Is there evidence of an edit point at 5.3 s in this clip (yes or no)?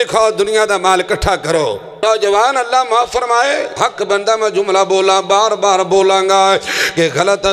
no